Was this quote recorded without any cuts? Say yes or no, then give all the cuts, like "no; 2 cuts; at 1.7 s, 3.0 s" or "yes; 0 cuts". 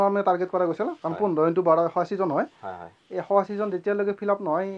yes; 0 cuts